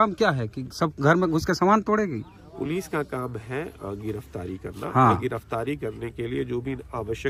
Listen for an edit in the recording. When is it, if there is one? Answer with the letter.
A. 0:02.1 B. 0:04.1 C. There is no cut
C